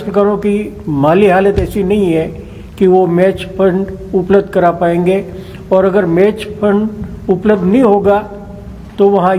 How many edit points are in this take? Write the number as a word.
zero